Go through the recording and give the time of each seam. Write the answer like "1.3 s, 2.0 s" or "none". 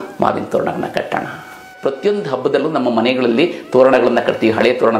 1.7 s